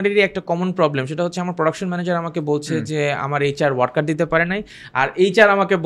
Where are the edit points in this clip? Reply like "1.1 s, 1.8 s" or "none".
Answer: none